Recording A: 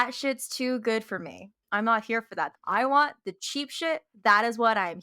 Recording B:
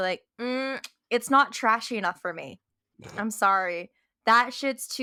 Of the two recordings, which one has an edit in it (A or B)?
A